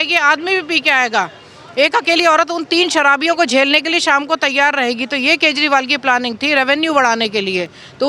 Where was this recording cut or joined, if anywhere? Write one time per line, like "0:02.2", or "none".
none